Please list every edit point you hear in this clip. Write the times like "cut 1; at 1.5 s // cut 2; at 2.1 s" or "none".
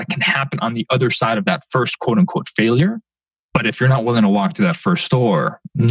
cut 1; at 3.3 s